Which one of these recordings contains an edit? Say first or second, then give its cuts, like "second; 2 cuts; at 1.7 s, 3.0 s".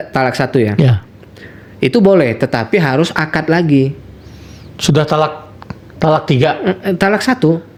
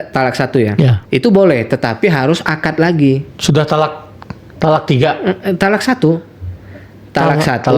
second; 2 cuts; at 1.0 s, 3.3 s